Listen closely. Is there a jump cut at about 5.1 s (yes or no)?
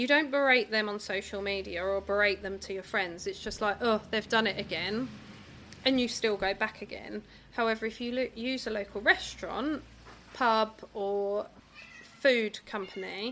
no